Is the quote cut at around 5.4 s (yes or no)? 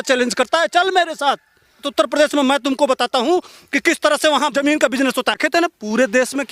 yes